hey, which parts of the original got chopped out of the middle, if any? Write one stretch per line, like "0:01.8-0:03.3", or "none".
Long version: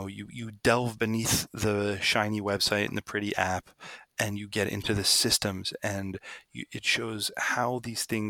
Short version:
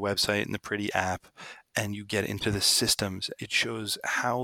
0:05.7-0:06.6

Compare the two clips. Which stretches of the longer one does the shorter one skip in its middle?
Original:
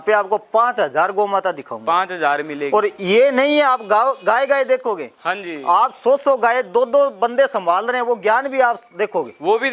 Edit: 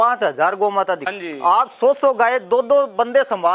0:01.7-0:05.4

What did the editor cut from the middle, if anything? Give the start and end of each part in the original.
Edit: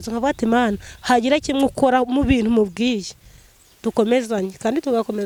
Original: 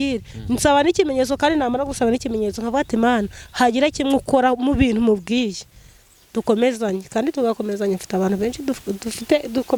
none

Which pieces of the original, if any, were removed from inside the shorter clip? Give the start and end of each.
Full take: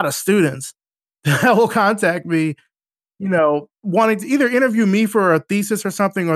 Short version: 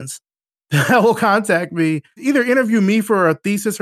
0:02.7-0:04.2

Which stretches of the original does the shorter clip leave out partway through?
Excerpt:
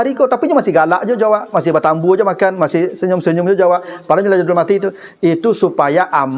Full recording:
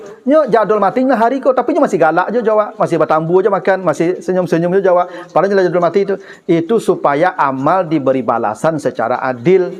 none

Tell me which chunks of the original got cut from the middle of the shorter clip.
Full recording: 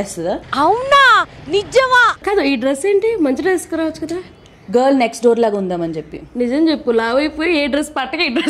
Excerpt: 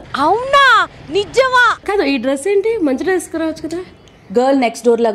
none

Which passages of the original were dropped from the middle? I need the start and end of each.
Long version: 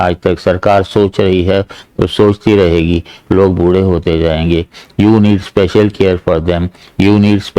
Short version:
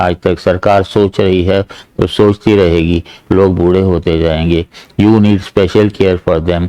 none

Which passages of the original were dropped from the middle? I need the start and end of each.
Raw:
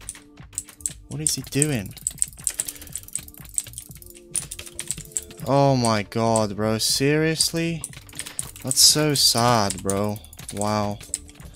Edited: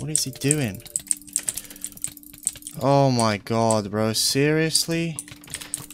0:03.7-0:05.2

